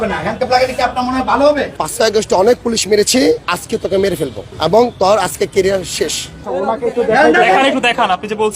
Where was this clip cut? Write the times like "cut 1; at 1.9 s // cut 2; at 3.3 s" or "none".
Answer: cut 1; at 1.8 s // cut 2; at 3.5 s // cut 3; at 4.4 s // cut 4; at 6.5 s